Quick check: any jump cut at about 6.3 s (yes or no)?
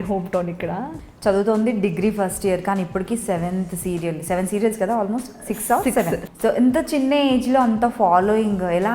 yes